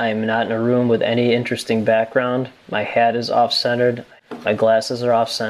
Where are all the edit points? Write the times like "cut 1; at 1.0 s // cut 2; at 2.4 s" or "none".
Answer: cut 1; at 4.1 s